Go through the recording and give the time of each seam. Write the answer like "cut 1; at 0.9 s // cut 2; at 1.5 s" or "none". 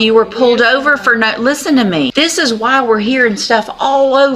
cut 1; at 2.1 s

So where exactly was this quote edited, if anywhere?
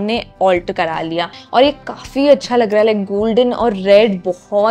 cut 1; at 1.4 s

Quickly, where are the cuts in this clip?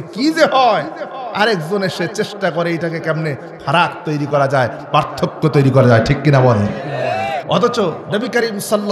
cut 1; at 7.4 s

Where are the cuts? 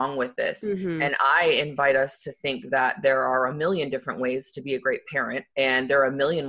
cut 1; at 5.5 s

